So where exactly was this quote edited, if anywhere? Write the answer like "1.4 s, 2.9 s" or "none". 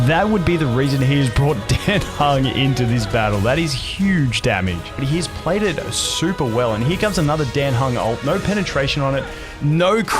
4.9 s